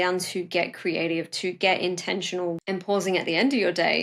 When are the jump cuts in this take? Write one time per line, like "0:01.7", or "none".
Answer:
0:02.6